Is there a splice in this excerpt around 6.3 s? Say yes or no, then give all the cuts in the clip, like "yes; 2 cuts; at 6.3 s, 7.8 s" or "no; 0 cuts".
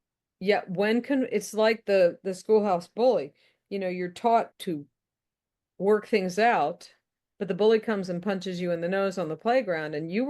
no; 1 cut; at 4.5 s